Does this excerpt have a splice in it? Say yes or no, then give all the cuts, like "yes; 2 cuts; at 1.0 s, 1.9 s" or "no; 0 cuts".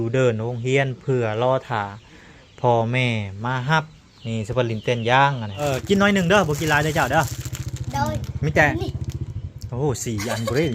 yes; 1 cut; at 5.5 s